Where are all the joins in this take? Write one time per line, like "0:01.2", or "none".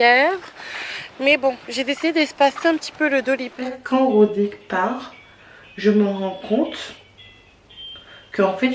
0:03.6